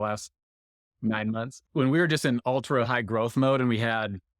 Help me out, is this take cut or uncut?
cut